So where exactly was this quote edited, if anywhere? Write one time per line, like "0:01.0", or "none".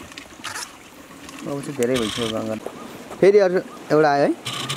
0:02.6